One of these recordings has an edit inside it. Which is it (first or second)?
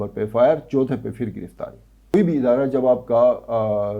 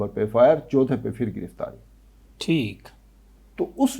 first